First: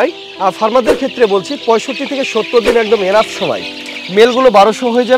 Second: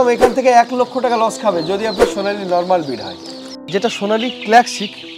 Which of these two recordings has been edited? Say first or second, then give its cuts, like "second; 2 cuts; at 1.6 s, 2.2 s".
second; 1 cut; at 3.6 s